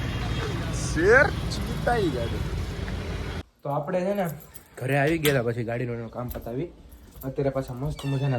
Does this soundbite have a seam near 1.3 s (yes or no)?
no